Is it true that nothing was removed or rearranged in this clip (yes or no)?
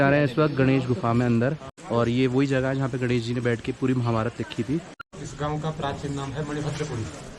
no